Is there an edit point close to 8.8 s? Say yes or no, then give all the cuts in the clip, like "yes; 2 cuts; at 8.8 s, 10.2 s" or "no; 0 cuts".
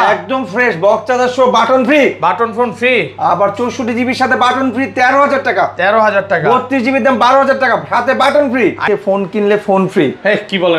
yes; 1 cut; at 8.8 s